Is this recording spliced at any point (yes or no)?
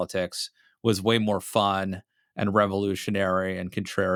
no